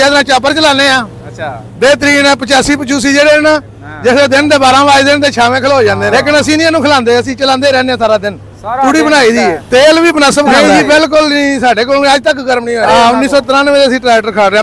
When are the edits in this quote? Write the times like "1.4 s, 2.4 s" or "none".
6.0 s, 9.5 s, 10.5 s, 12.8 s